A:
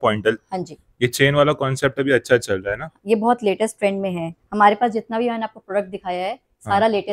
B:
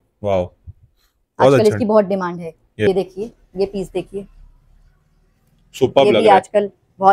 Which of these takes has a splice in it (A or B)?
B